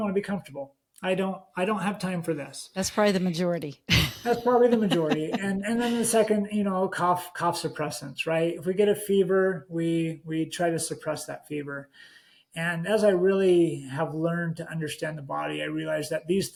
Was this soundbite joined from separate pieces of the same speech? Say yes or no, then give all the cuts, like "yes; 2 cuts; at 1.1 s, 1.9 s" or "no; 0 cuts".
no; 0 cuts